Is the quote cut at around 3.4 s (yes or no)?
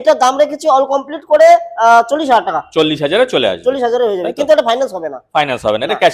no